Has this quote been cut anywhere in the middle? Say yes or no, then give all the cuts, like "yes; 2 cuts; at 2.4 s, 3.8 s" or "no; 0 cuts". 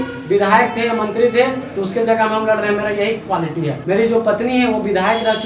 yes; 1 cut; at 3.8 s